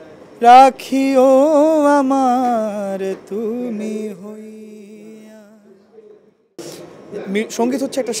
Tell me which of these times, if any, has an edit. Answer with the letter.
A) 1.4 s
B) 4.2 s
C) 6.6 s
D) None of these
C